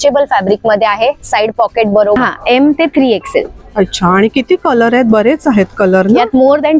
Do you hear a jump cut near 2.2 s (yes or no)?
yes